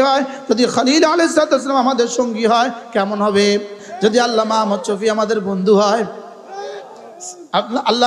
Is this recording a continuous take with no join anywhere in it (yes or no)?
no